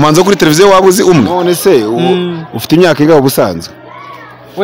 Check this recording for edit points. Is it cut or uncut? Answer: cut